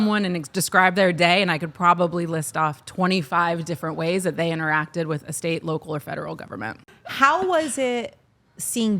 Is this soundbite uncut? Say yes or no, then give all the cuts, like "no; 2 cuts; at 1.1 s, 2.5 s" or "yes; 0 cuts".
no; 1 cut; at 7.0 s